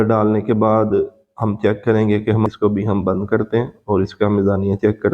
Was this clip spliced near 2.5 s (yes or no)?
yes